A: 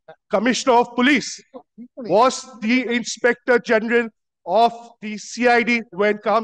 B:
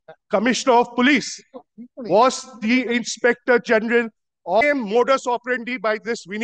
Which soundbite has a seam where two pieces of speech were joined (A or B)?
B